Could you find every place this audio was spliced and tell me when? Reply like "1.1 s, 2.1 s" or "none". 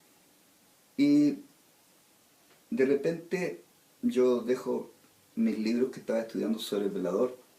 1.4 s